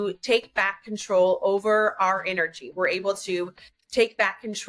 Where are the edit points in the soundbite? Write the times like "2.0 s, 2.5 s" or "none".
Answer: none